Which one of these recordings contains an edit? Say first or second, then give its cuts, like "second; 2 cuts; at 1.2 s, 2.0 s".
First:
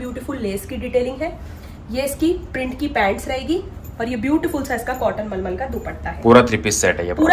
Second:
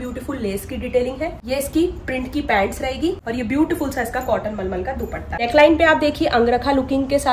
second; 3 cuts; at 1.4 s, 3.2 s, 5.4 s